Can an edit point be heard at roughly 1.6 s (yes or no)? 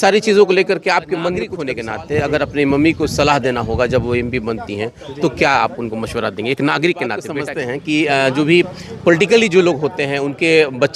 yes